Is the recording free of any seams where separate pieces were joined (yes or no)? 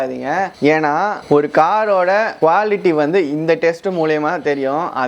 no